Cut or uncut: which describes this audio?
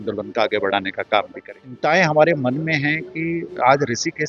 cut